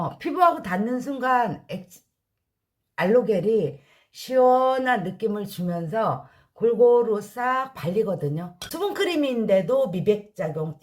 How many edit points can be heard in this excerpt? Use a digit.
1